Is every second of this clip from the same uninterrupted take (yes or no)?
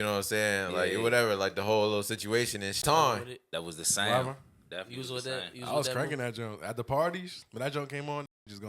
no